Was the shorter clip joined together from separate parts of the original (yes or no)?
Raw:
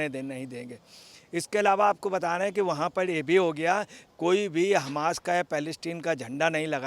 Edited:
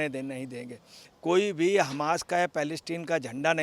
yes